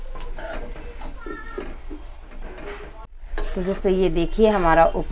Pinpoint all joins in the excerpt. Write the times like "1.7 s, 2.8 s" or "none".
2.9 s